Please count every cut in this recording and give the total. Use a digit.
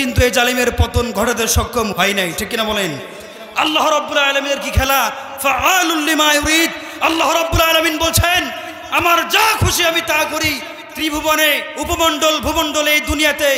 2